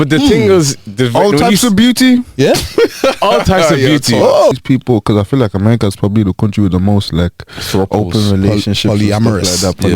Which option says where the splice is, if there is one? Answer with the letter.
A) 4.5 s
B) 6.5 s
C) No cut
A